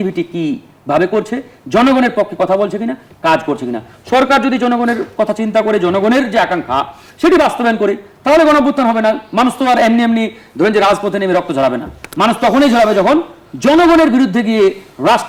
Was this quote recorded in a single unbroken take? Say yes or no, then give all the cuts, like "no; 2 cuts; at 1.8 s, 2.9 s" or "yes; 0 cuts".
yes; 0 cuts